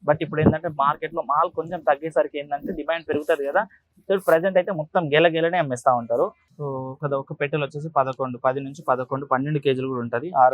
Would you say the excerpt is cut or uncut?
cut